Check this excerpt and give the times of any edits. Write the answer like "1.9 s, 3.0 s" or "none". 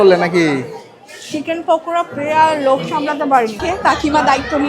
3.6 s